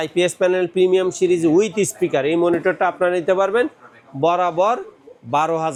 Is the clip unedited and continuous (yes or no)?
yes